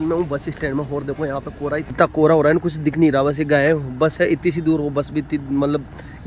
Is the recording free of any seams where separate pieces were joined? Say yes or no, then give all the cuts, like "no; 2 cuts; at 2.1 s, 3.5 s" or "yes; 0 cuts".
no; 1 cut; at 1.8 s